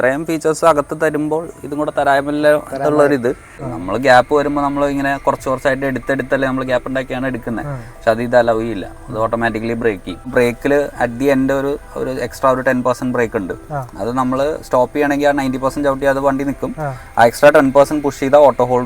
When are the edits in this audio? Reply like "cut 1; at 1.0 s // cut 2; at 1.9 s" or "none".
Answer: cut 1; at 3.7 s // cut 2; at 10.2 s